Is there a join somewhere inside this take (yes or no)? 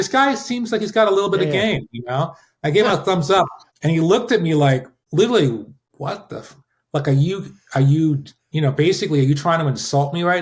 yes